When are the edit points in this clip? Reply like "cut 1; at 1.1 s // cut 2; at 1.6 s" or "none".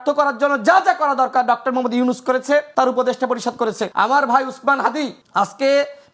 cut 1; at 2.7 s // cut 2; at 3.9 s // cut 3; at 5.2 s

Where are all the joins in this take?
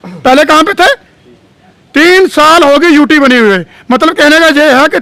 none

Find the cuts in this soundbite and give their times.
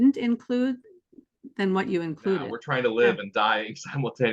cut 1; at 2.6 s

